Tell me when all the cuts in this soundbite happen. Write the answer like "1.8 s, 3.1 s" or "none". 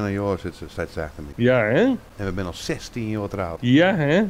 1.2 s, 2.1 s, 3.5 s